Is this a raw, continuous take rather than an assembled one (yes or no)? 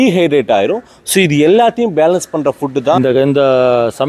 no